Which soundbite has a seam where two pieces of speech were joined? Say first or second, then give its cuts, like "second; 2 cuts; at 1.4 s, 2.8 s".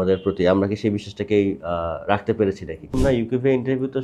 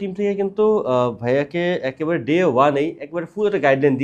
first; 1 cut; at 3.0 s